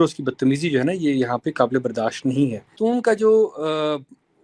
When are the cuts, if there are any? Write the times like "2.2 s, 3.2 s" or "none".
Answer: 2.8 s